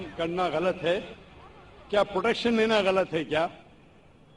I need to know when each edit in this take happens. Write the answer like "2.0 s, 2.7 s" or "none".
none